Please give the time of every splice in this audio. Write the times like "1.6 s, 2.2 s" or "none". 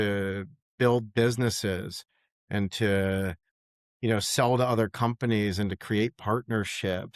none